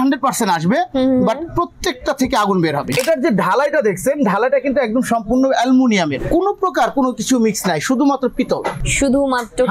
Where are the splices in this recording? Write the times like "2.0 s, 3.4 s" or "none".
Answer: 2.9 s, 6.2 s, 8.8 s